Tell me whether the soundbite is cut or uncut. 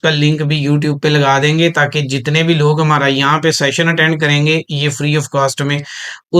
uncut